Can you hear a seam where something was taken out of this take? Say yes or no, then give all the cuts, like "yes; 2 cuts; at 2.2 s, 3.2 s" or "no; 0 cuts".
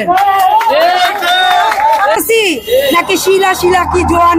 yes; 1 cut; at 2.1 s